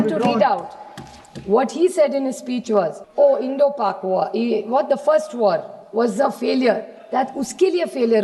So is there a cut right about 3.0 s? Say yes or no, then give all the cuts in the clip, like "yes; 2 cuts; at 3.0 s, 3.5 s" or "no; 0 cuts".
yes; 1 cut; at 3.0 s